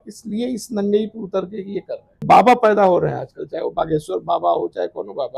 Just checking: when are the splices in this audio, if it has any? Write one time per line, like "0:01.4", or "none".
0:02.2